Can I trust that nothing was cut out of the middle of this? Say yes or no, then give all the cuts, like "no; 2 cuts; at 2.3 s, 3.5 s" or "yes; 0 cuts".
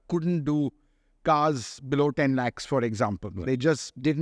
yes; 0 cuts